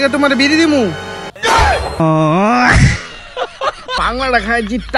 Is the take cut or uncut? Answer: cut